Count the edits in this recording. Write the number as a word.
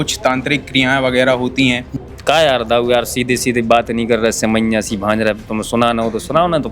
one